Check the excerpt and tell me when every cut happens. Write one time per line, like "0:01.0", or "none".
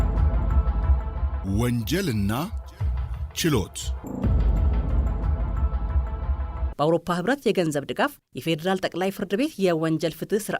0:01.4
0:03.9
0:06.7